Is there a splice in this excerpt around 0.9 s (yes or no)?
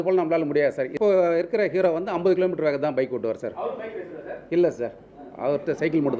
yes